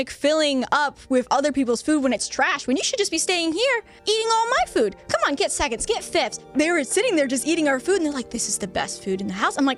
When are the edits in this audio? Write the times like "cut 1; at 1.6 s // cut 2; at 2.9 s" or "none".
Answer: cut 1; at 3.9 s // cut 2; at 6.4 s